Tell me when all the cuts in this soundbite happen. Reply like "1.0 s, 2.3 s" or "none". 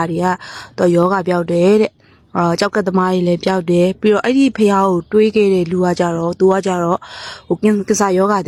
none